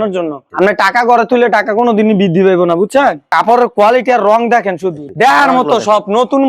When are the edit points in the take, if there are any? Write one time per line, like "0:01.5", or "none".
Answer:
0:03.3
0:05.1